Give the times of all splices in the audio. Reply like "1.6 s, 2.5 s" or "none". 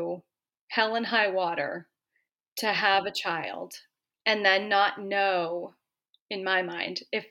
none